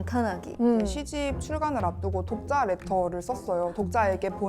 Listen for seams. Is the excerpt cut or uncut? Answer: cut